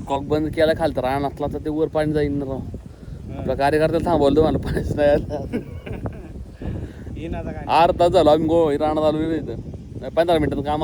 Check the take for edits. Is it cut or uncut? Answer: uncut